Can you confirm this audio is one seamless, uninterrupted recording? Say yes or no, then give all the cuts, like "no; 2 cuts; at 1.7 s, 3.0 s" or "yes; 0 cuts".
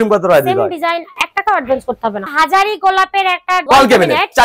no; 1 cut; at 2.3 s